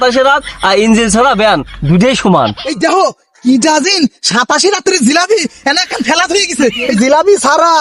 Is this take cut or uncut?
cut